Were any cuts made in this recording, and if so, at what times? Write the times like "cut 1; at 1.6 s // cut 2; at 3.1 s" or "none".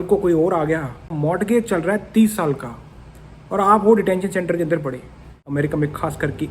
cut 1; at 1.1 s // cut 2; at 5.4 s